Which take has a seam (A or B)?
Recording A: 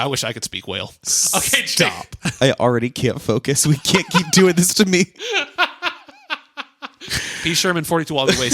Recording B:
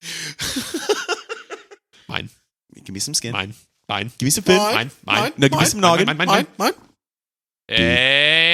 A